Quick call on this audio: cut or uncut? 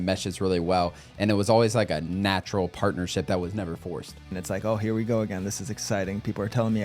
cut